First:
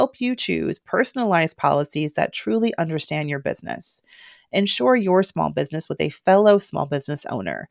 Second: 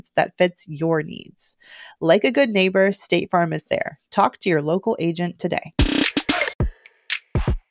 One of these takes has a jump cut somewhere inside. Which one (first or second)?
second